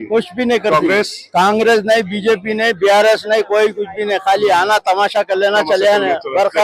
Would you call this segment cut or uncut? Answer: uncut